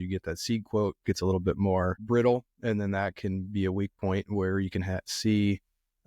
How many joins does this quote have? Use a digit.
1